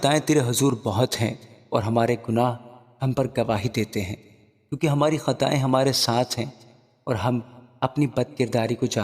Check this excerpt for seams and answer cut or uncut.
uncut